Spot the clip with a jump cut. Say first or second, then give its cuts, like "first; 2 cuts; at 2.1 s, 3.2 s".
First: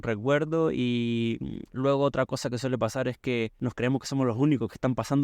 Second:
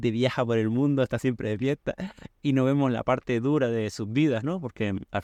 first; 1 cut; at 3.5 s